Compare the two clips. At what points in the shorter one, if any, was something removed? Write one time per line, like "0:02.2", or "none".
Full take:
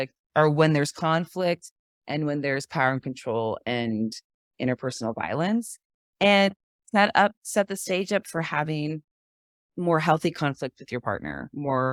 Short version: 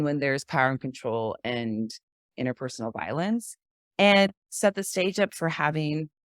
0:04.5